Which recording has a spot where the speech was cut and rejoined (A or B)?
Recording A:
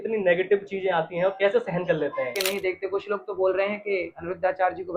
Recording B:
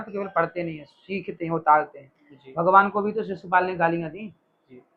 A